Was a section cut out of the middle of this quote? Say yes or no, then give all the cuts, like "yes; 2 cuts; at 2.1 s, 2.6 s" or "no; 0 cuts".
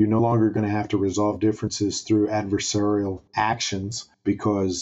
no; 0 cuts